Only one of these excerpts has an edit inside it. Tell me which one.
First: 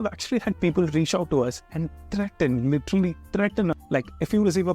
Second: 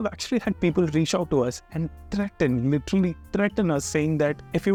first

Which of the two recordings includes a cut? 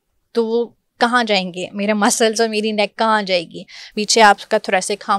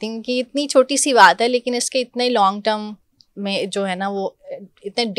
first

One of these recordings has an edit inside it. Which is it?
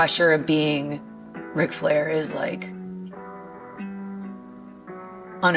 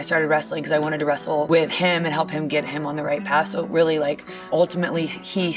second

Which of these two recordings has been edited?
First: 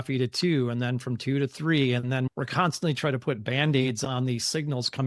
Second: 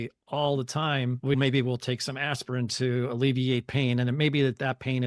second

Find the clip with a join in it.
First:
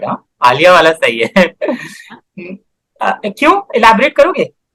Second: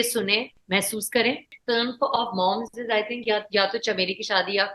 second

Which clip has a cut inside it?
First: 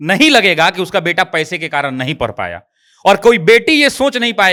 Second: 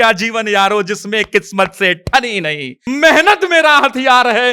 second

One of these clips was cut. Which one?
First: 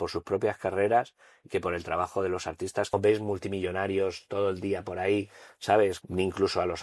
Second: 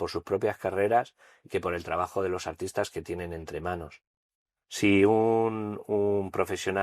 first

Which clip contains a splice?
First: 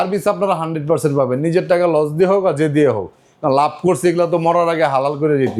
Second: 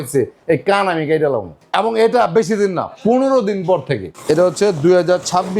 second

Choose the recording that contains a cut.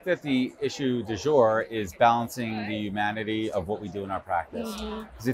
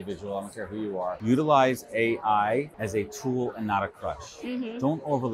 second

